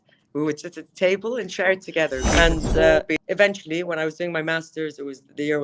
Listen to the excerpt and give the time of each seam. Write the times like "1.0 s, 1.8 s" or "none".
2.3 s